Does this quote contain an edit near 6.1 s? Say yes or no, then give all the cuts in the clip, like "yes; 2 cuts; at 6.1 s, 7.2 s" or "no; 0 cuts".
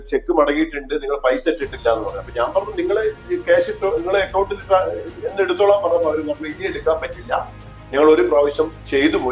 no; 0 cuts